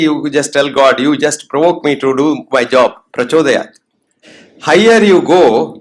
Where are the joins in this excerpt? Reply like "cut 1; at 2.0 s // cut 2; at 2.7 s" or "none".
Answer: cut 1; at 4.2 s